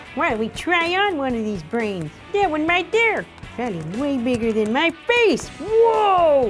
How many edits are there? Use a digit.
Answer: 1